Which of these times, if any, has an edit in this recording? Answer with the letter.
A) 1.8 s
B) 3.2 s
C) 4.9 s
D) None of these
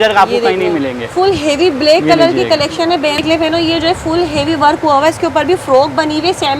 B